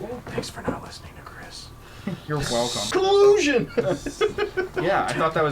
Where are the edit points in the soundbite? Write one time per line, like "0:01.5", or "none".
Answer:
0:02.8